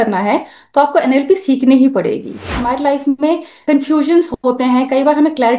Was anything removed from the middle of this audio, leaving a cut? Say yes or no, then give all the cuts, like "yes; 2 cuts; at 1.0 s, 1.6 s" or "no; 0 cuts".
yes; 2 cuts; at 2.5 s, 3.6 s